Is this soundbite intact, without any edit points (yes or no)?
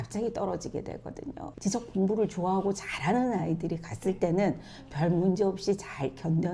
no